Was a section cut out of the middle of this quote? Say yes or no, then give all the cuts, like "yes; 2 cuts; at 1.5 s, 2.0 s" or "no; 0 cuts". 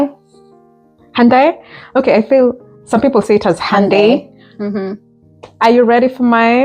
no; 0 cuts